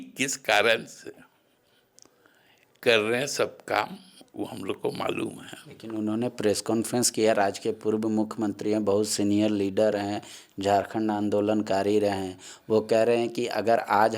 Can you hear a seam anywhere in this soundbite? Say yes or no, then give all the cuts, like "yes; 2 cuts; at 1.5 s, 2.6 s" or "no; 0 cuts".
no; 0 cuts